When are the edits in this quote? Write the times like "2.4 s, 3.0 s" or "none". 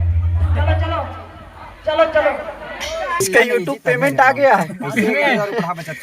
3.3 s